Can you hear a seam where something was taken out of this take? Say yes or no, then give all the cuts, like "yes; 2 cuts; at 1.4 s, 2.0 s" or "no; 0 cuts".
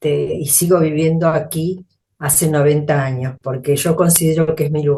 no; 0 cuts